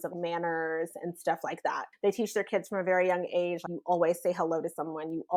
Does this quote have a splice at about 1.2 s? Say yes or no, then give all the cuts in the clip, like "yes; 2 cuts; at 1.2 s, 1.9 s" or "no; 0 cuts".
no; 0 cuts